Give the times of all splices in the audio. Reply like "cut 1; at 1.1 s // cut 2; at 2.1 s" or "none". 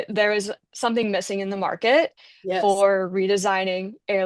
none